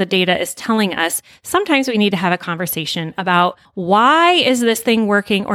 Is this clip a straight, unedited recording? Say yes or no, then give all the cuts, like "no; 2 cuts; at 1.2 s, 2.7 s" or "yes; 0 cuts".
no; 1 cut; at 3.7 s